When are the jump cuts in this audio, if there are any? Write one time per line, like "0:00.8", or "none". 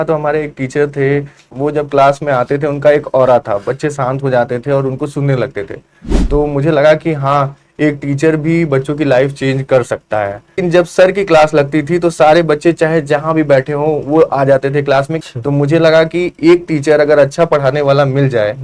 0:01.4
0:10.6
0:15.2